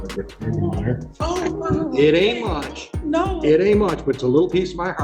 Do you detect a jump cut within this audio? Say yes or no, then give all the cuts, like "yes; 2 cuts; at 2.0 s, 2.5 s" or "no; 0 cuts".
no; 0 cuts